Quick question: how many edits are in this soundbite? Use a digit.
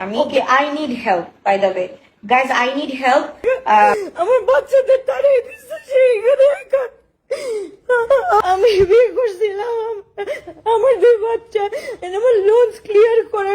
2